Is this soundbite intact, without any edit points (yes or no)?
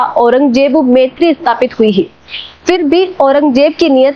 yes